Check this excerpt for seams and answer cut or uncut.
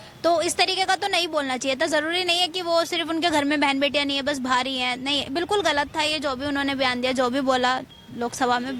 uncut